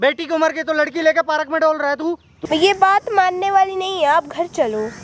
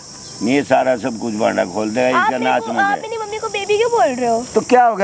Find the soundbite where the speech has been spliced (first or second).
first